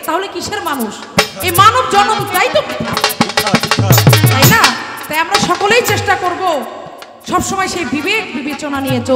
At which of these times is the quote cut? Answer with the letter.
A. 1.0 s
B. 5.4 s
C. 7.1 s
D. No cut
D